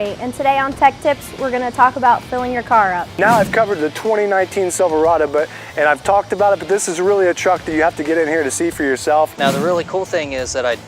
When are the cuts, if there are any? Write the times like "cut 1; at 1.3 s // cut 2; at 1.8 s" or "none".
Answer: cut 1; at 3.1 s // cut 2; at 9.3 s